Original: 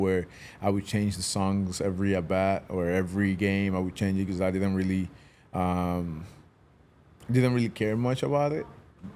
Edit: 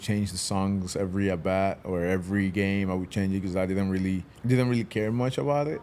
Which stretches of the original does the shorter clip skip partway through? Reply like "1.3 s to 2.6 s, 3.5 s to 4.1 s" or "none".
5.2 s to 7.2 s